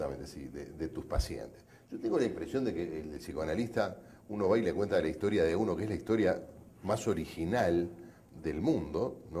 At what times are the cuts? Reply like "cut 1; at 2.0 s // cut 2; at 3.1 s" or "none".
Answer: none